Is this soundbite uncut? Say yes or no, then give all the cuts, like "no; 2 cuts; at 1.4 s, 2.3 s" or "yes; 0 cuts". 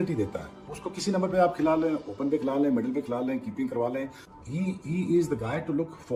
yes; 0 cuts